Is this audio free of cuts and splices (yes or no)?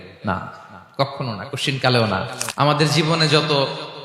no